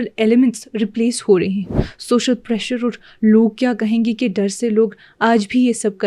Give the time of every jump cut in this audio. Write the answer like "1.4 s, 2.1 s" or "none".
1.7 s